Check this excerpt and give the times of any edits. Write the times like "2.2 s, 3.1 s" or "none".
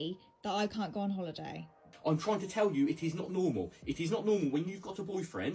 1.9 s